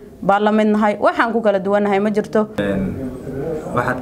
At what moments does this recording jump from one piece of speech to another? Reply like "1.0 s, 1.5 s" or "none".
2.6 s